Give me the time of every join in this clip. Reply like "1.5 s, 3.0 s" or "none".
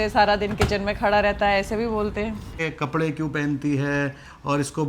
2.6 s